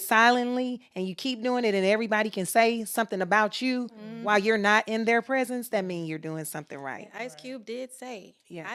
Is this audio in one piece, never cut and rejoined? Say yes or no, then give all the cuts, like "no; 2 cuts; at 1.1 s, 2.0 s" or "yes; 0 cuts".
yes; 0 cuts